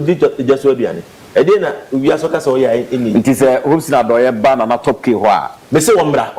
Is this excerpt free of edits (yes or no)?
yes